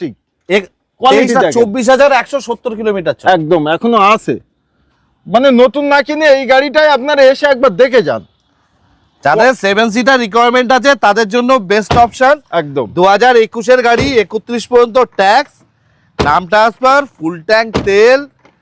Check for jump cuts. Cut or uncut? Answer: uncut